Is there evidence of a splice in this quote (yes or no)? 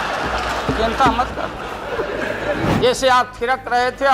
yes